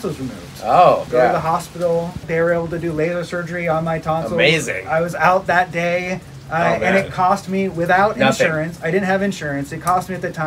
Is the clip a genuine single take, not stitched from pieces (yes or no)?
yes